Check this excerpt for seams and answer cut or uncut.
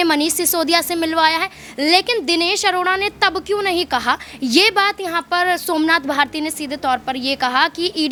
uncut